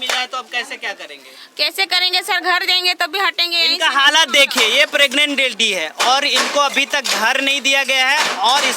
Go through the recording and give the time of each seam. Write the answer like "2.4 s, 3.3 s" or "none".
none